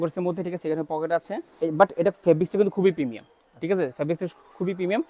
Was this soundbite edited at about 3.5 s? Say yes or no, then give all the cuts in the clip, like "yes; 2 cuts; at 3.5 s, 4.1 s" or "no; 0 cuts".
no; 1 cut; at 1.4 s